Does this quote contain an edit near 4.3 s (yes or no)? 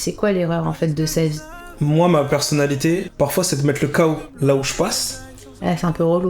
yes